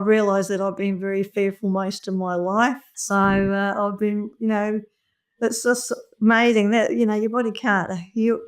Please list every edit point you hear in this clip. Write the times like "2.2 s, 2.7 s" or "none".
none